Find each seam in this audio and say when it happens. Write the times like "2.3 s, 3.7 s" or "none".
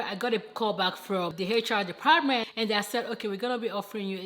1.3 s, 2.5 s